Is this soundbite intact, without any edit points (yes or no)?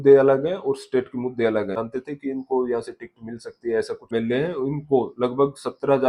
no